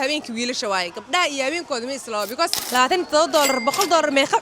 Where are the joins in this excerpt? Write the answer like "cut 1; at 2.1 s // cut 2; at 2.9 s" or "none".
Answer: cut 1; at 2.6 s